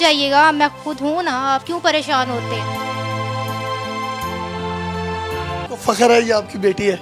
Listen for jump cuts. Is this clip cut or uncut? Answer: cut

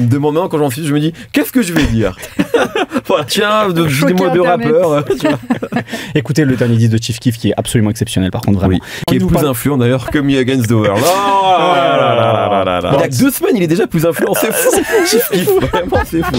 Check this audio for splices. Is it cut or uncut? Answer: cut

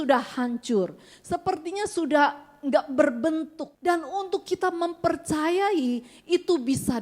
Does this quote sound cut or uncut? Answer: cut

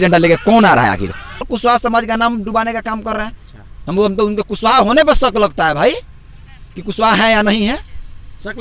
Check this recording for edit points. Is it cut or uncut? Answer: cut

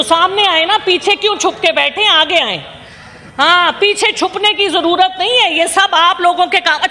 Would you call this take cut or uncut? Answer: uncut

